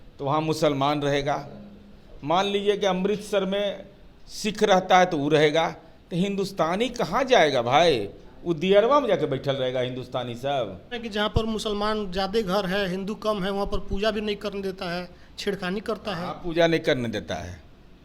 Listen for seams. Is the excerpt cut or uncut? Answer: cut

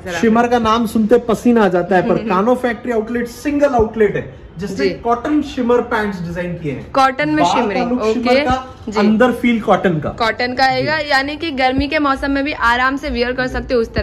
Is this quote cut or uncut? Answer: uncut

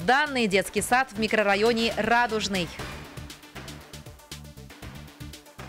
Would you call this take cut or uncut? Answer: uncut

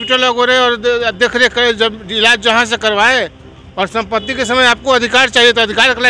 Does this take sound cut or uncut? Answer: uncut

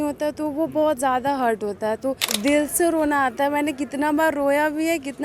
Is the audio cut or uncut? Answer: cut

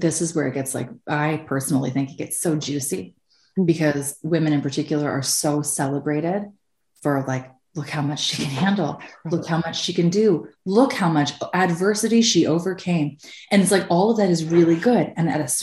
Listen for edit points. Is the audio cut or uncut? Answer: cut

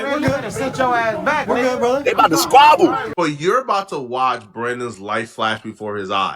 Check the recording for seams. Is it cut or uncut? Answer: cut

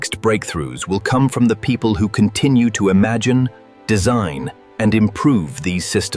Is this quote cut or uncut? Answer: uncut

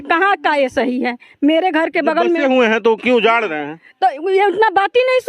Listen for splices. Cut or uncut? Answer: uncut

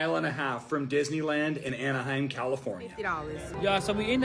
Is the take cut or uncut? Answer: cut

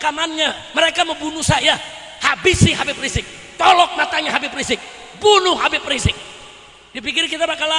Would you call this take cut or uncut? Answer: uncut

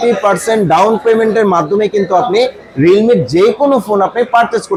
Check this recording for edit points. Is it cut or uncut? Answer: uncut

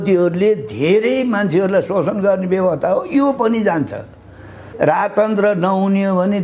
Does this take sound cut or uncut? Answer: cut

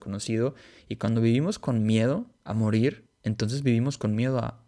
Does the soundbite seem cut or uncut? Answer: cut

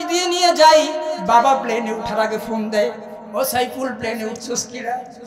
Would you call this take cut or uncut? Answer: uncut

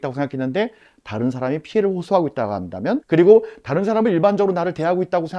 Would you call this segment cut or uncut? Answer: cut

